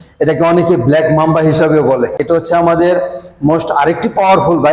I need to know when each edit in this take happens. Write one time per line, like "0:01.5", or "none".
0:02.2